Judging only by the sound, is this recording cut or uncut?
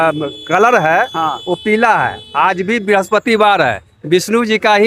uncut